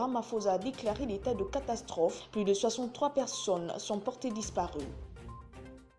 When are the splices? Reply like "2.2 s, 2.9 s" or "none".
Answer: 5.0 s